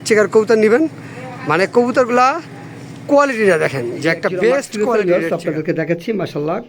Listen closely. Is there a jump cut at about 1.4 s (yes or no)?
no